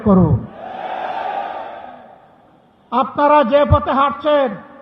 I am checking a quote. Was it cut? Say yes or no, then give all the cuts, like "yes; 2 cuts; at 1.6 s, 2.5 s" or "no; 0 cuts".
no; 0 cuts